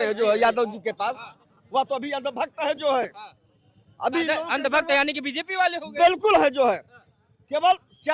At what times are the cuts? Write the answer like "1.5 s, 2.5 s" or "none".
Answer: none